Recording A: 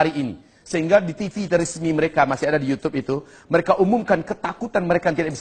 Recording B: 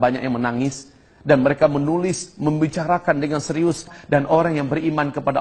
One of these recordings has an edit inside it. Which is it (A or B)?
B